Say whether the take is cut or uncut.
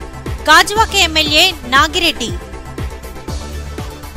uncut